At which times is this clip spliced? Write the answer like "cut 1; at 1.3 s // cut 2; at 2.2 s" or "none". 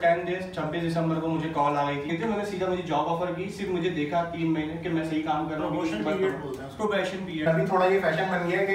cut 1; at 2.1 s // cut 2; at 7.4 s